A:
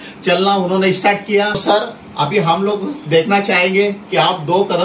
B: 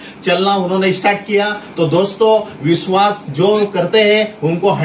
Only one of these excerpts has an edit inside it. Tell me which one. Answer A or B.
A